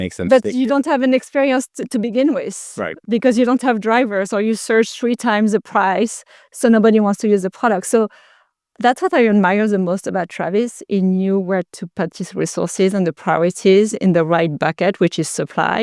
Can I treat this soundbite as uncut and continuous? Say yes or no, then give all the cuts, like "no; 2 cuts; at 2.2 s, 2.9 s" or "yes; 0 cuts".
yes; 0 cuts